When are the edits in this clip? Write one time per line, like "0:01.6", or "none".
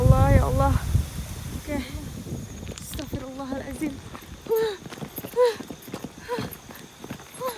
0:02.1